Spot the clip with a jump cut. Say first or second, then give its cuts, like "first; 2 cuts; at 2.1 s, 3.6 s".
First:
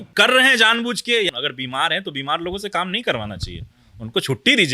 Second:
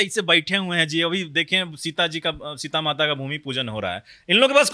first; 1 cut; at 1.3 s